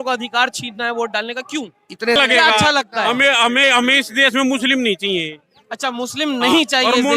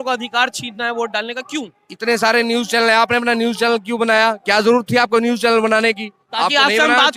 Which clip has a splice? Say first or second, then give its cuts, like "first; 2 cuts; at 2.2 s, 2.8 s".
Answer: first; 1 cut; at 2.2 s